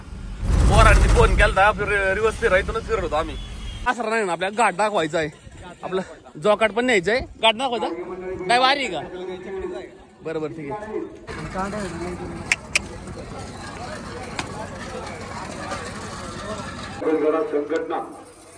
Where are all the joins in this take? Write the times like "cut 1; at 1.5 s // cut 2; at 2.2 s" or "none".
cut 1; at 3.9 s // cut 2; at 11.3 s